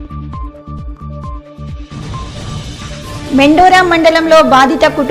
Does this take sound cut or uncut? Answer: cut